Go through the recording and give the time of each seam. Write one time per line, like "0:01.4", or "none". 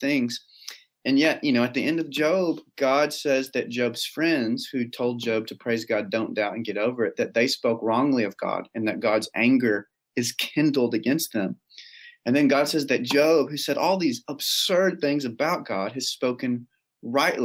none